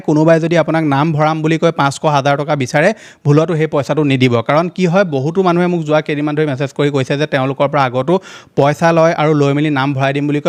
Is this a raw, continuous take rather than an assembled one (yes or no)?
yes